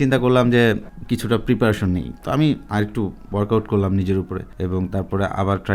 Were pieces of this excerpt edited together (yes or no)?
yes